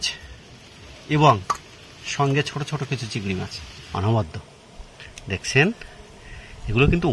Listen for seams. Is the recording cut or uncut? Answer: cut